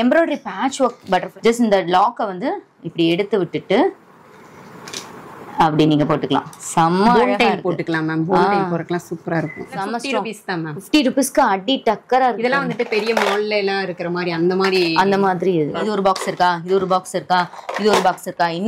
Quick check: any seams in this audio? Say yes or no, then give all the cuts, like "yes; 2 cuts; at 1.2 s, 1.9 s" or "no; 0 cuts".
yes; 3 cuts; at 1.3 s, 9.6 s, 15.8 s